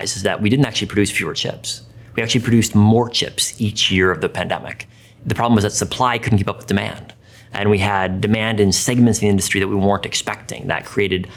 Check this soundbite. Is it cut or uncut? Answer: uncut